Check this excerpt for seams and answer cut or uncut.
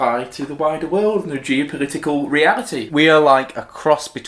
cut